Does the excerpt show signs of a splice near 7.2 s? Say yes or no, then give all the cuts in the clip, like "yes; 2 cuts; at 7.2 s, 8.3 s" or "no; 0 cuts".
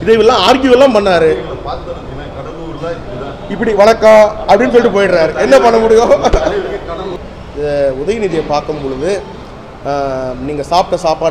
yes; 1 cut; at 7.2 s